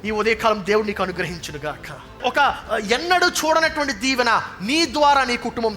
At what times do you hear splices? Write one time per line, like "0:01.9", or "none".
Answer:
0:02.2